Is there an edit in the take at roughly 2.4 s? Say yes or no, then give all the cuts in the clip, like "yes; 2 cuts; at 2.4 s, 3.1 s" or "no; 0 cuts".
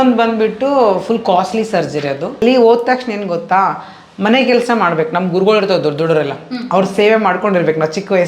yes; 1 cut; at 2.4 s